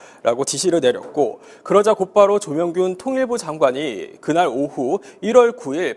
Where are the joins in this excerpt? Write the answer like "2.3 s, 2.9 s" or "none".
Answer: 2.0 s